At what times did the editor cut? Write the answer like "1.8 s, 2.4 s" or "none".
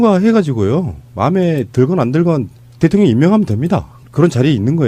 none